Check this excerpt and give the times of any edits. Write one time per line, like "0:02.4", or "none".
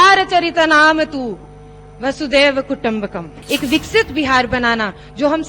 0:03.3